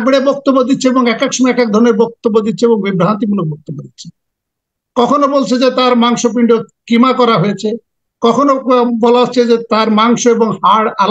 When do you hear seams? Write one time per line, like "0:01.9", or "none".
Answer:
none